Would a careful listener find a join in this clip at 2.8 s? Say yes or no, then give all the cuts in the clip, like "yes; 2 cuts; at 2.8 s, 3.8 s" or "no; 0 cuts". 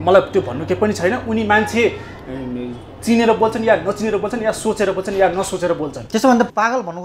no; 0 cuts